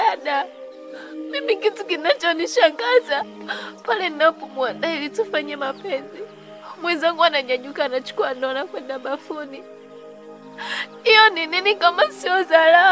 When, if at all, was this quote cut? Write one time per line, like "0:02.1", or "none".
none